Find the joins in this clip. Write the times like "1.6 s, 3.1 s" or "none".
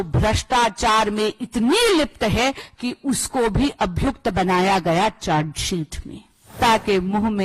6.5 s